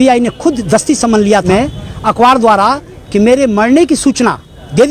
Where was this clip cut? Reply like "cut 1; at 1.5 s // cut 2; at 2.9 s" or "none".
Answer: cut 1; at 1.5 s